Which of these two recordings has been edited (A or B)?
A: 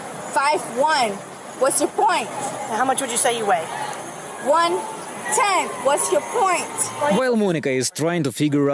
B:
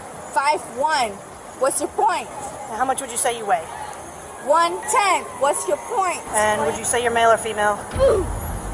B